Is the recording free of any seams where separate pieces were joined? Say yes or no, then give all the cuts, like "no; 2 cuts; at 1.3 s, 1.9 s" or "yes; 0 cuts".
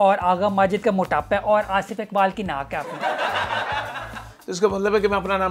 yes; 0 cuts